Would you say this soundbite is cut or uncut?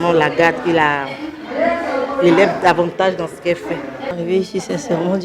cut